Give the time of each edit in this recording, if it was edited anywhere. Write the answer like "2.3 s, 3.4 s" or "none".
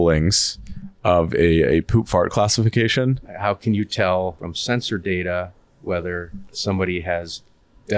3.3 s, 4.5 s, 6.5 s